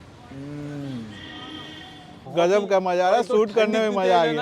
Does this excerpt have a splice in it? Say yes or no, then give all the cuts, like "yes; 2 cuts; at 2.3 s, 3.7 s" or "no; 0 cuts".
yes; 1 cut; at 2.2 s